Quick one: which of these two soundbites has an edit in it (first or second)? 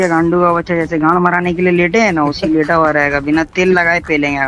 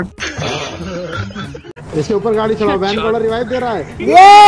second